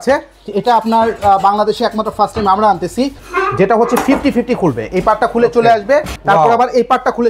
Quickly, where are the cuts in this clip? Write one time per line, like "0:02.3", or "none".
0:03.2
0:06.1

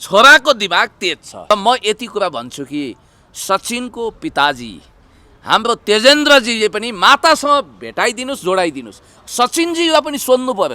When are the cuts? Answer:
0:01.5

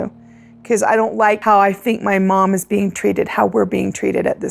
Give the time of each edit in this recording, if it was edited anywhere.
0:01.4

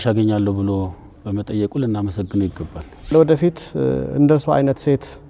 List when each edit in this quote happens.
0:03.1

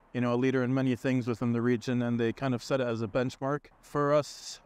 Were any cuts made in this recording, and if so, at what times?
0:03.8

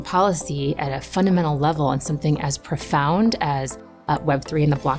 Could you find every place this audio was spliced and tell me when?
none

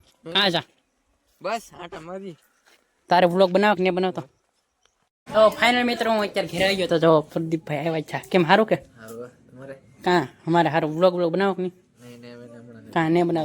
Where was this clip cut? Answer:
0:05.1

